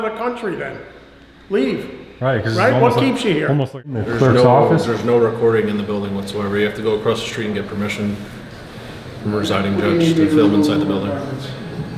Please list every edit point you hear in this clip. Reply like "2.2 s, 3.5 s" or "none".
4.0 s